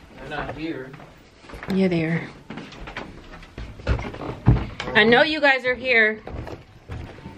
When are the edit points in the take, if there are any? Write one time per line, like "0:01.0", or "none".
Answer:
0:03.7